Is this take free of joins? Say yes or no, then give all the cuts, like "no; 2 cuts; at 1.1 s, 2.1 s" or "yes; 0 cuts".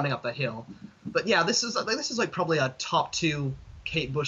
yes; 0 cuts